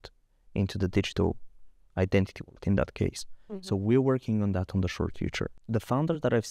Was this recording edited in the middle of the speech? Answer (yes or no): yes